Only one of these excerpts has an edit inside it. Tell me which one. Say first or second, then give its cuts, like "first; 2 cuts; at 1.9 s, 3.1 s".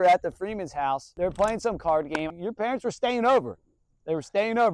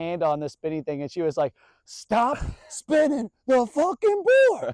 first; 2 cuts; at 1.1 s, 2.3 s